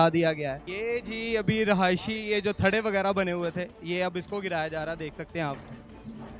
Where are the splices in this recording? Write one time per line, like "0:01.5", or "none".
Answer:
0:01.0